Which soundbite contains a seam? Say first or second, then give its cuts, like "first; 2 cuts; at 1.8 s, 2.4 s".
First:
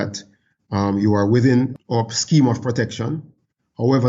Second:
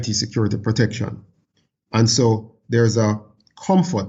first; 1 cut; at 1.7 s